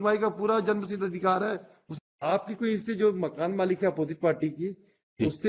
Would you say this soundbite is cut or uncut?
cut